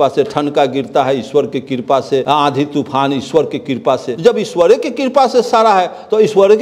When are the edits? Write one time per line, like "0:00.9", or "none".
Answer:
0:02.2
0:04.1